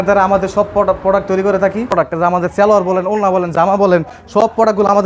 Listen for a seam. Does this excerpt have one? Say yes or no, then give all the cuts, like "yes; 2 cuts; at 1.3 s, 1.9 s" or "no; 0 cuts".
yes; 1 cut; at 1.9 s